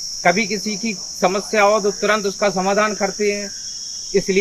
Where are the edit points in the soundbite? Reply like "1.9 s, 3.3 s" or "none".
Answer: none